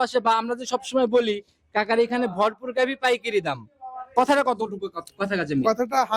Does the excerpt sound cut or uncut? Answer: uncut